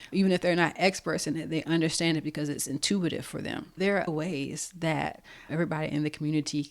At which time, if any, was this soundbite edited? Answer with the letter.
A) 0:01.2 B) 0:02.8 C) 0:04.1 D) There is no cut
C